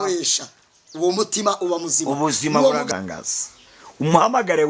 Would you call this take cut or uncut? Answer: cut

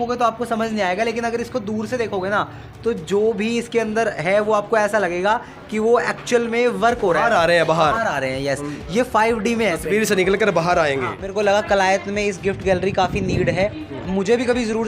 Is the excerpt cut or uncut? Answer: cut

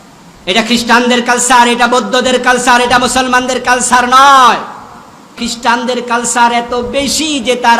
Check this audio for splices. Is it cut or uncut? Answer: cut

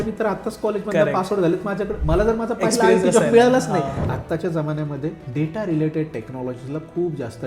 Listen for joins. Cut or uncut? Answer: cut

